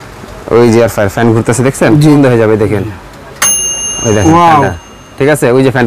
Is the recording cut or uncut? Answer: cut